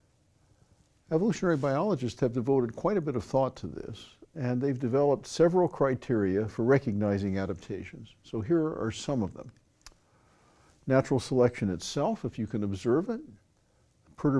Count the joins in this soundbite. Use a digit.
1